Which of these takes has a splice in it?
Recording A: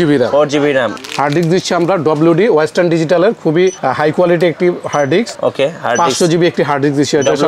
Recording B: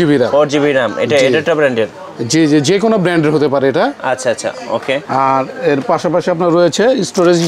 A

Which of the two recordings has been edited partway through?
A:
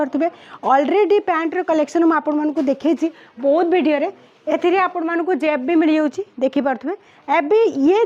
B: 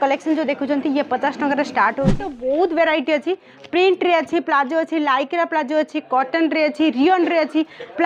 B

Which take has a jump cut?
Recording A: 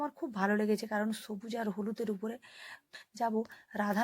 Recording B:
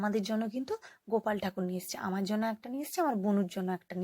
A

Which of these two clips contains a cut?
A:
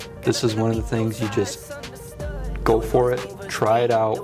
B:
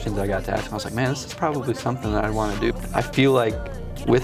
B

